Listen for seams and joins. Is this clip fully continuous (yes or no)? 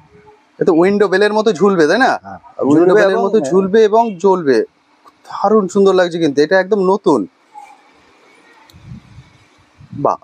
yes